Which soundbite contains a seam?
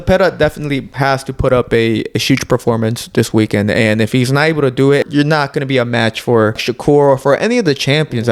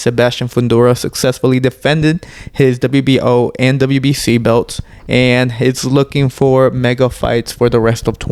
first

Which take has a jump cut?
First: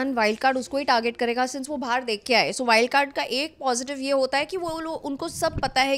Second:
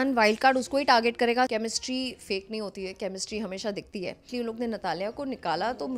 second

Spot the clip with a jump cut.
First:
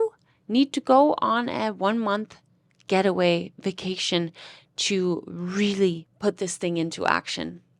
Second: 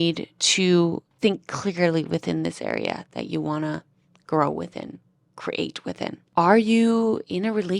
second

